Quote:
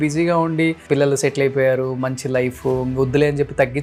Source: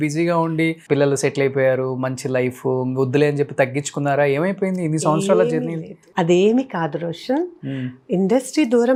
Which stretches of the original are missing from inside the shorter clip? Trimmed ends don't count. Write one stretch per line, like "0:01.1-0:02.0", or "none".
none